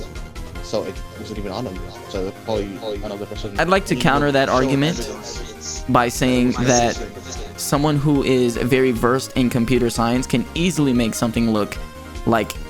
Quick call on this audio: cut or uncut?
cut